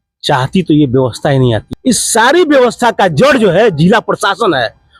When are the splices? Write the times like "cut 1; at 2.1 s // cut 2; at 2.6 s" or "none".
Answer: cut 1; at 1.6 s